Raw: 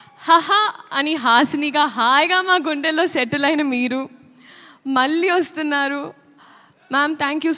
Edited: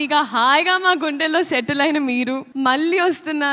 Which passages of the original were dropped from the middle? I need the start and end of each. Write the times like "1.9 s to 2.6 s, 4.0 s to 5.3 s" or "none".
4.1 s to 4.8 s